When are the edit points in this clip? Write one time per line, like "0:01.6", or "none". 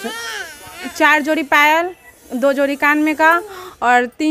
none